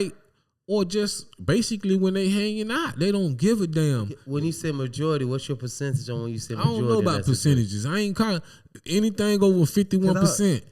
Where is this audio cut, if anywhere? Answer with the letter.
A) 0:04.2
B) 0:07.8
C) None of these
A